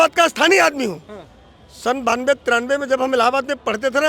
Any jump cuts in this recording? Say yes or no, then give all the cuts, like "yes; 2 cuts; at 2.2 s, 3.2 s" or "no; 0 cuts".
no; 0 cuts